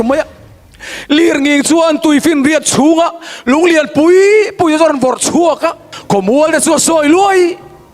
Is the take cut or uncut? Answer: cut